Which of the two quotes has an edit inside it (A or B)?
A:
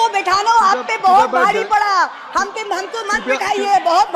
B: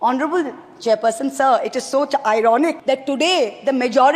B